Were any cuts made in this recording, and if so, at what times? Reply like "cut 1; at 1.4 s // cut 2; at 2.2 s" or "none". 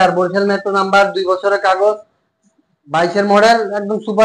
none